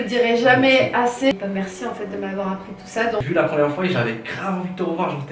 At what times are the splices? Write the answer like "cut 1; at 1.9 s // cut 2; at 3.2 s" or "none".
cut 1; at 3.2 s